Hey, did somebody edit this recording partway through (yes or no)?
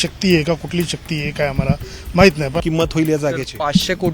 yes